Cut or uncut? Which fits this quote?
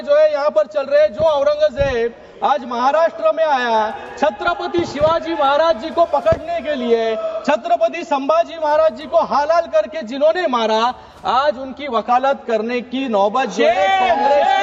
uncut